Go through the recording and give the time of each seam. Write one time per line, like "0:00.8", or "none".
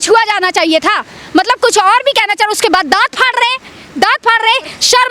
none

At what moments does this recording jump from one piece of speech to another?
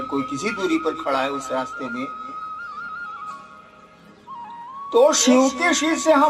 0:02.4
0:04.9

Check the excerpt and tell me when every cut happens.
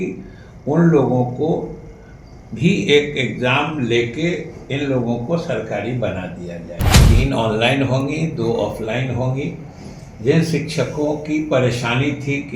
0:07.0

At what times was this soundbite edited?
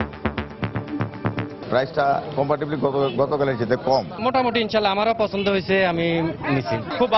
none

